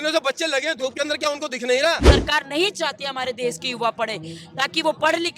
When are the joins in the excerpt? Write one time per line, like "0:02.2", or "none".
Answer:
0:02.0